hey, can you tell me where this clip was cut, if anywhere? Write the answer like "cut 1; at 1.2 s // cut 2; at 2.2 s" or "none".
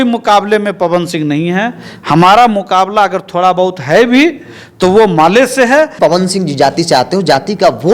cut 1; at 5.9 s